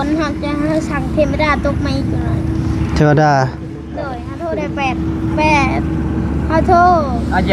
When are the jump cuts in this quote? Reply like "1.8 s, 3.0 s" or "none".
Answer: none